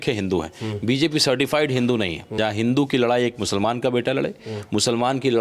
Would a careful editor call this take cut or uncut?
cut